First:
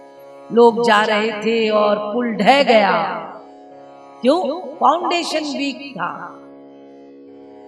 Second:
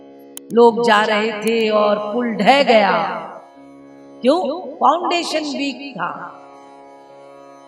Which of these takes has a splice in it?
second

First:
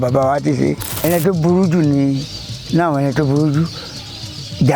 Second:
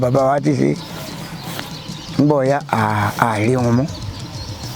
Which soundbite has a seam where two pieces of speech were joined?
first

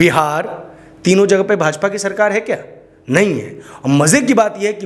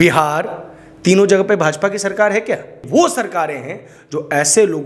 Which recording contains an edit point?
second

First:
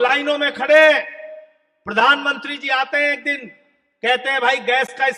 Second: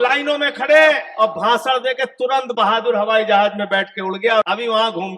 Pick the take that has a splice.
second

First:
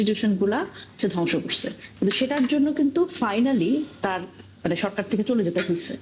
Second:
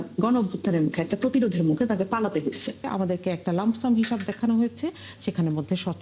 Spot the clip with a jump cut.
second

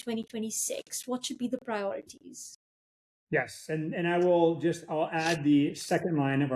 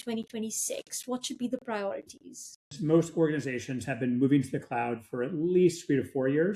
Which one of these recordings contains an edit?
second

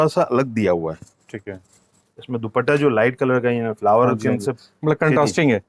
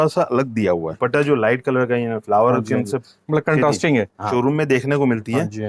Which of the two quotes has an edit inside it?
second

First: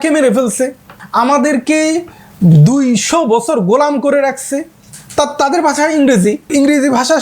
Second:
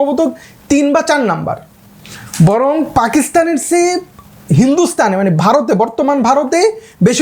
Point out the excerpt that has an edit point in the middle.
first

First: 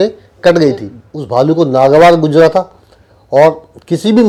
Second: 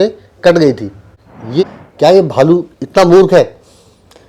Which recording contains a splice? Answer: second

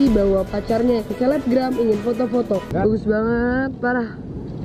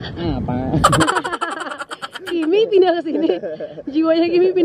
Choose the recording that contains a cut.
first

